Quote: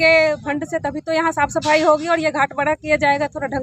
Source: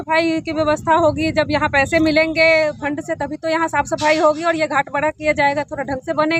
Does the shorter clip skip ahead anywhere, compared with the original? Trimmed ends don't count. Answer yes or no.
no